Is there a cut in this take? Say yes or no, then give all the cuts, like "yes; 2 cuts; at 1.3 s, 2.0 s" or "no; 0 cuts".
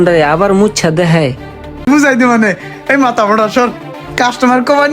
yes; 1 cut; at 1.9 s